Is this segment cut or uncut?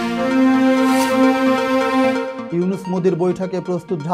cut